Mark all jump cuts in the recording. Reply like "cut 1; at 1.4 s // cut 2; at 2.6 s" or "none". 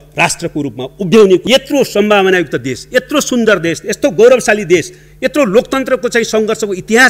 cut 1; at 1.4 s